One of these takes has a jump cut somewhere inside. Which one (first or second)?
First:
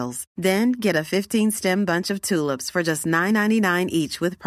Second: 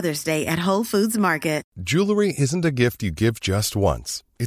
second